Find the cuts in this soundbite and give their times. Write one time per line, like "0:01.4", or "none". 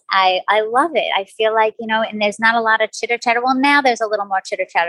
none